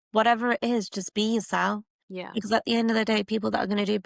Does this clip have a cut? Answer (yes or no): no